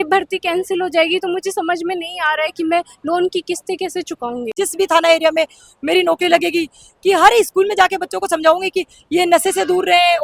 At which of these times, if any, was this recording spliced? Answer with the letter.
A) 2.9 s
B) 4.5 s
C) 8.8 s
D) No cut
B